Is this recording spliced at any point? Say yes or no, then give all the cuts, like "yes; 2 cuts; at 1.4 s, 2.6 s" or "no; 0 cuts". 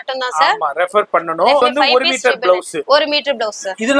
yes; 1 cut; at 1.6 s